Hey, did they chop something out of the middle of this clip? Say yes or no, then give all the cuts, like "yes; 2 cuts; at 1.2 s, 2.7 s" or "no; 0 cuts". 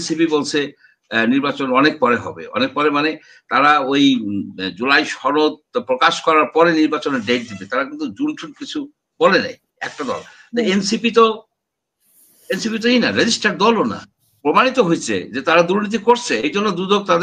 yes; 1 cut; at 14.2 s